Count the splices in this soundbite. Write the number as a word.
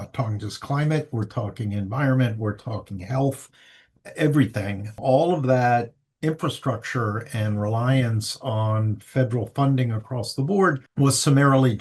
one